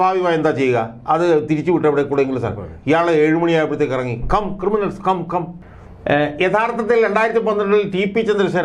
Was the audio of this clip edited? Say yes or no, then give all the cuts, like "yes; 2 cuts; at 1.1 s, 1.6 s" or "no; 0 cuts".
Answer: yes; 1 cut; at 5.6 s